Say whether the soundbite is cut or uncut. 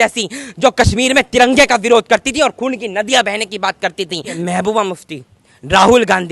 cut